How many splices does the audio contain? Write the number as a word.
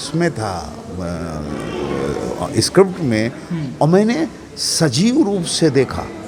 zero